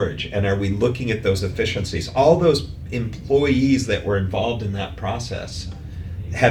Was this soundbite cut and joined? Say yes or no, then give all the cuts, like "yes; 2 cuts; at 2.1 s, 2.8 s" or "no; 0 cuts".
no; 0 cuts